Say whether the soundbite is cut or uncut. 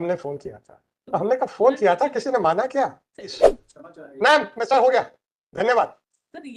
cut